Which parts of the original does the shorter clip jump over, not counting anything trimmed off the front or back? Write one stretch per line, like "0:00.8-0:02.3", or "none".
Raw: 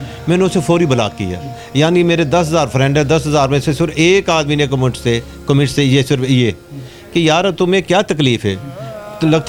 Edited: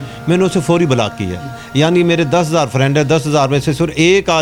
none